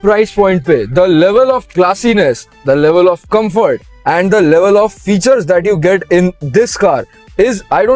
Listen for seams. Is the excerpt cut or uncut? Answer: uncut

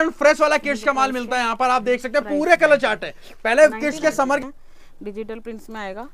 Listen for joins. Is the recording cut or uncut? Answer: cut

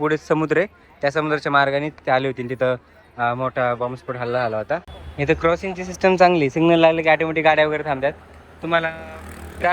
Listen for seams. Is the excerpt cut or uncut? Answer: cut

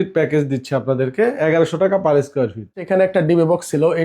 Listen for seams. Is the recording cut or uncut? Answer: cut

